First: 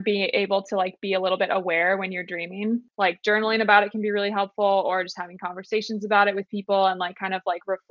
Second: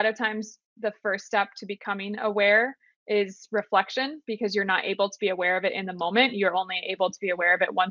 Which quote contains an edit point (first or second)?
first